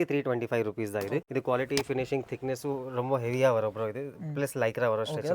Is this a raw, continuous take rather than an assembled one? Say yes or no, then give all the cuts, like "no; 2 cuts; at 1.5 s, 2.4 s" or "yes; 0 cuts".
no; 1 cut; at 1.3 s